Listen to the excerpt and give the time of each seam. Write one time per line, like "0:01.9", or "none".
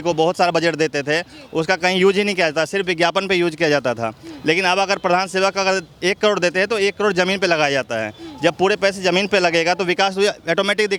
none